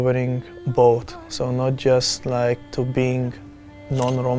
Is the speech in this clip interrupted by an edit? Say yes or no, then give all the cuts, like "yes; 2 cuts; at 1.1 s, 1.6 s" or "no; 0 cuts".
yes; 1 cut; at 2.7 s